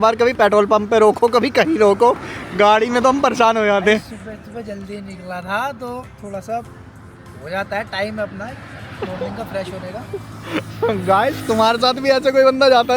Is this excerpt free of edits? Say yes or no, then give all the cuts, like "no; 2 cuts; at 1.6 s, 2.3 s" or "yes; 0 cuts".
yes; 0 cuts